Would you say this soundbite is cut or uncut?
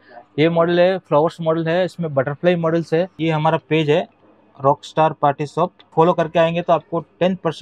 cut